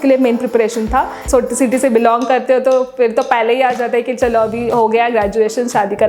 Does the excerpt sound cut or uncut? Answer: cut